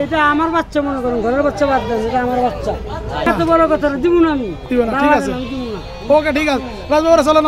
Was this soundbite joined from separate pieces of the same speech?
yes; 1 cut; at 3.3 s

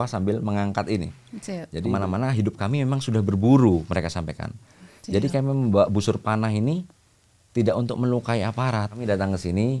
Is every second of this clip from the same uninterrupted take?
no; 2 cuts; at 1.8 s, 8.9 s

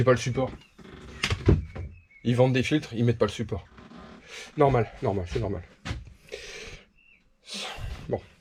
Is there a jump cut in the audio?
no; 0 cuts

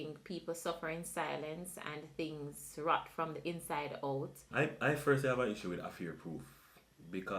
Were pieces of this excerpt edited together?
yes; 1 cut; at 4.4 s

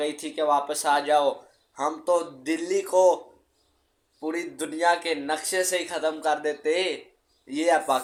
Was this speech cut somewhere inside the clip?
no; 0 cuts

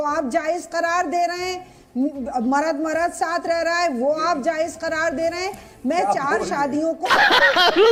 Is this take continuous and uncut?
yes; 0 cuts

